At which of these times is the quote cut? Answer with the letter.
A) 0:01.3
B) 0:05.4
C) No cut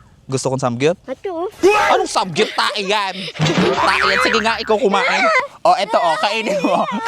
B